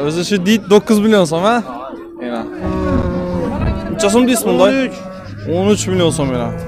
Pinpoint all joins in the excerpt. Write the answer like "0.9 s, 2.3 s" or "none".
2.6 s